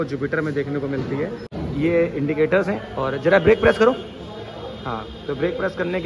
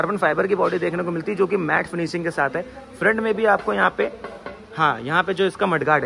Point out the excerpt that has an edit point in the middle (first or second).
first